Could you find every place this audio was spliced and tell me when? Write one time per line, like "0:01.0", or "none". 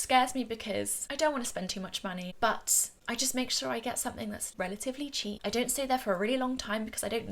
0:01.0
0:04.4
0:05.4